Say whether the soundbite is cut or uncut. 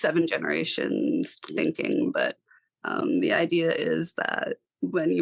uncut